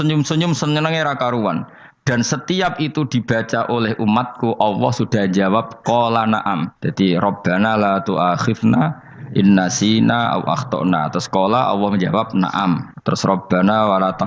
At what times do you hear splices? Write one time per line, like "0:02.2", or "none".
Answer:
0:06.8
0:12.9